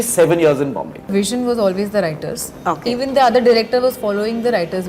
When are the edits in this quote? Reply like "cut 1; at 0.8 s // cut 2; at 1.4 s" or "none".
cut 1; at 1.1 s